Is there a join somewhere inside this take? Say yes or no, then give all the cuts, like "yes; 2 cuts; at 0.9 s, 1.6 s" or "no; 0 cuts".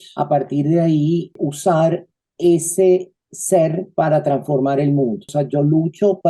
yes; 1 cut; at 1.5 s